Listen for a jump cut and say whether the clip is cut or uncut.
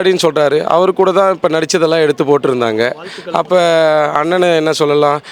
uncut